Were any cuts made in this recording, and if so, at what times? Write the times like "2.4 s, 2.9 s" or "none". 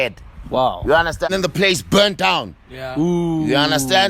1.3 s